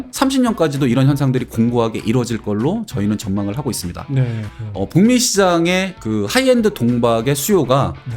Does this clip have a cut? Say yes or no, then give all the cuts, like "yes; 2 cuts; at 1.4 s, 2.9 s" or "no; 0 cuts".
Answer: yes; 1 cut; at 4.5 s